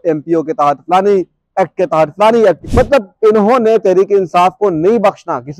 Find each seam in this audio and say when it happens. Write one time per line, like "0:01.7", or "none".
0:02.6